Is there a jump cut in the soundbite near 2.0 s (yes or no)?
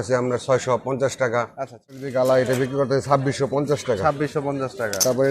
yes